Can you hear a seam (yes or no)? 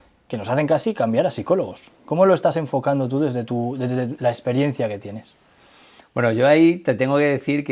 no